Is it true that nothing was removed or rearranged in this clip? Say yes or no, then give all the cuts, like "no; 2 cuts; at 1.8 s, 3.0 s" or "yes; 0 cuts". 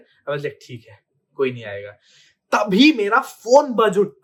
yes; 0 cuts